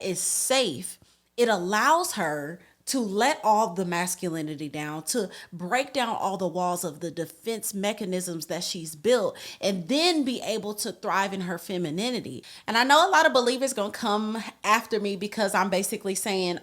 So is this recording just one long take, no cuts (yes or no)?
yes